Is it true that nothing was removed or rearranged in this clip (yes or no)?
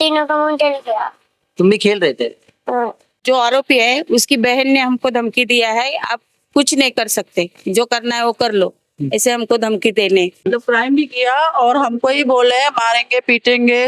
no